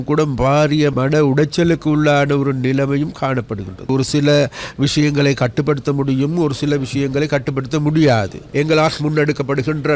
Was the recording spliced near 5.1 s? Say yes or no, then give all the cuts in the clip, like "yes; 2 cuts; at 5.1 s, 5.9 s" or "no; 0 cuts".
no; 3 cuts; at 0.9 s, 3.9 s, 8.4 s